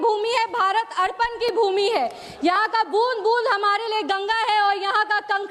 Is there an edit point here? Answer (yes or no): no